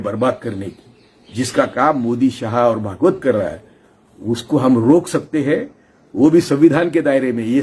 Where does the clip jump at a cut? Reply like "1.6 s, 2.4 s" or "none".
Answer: none